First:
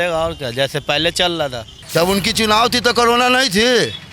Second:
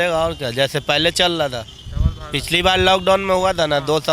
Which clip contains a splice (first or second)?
first